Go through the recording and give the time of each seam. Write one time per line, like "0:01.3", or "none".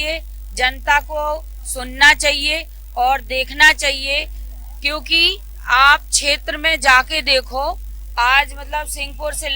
none